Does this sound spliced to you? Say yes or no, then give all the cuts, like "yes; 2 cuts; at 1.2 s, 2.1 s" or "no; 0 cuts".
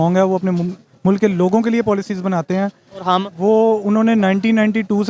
no; 0 cuts